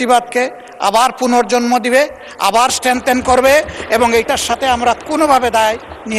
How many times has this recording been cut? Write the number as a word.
zero